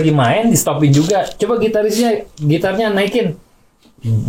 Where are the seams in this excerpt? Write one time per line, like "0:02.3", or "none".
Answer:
none